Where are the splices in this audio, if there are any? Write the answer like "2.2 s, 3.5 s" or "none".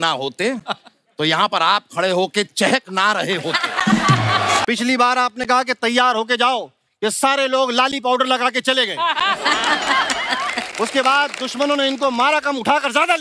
4.6 s